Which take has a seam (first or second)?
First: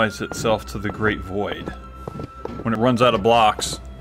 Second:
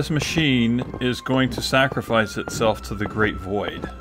first